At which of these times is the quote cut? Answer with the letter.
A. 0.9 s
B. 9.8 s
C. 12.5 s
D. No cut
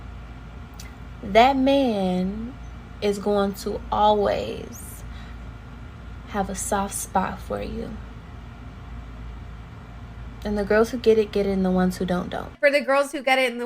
C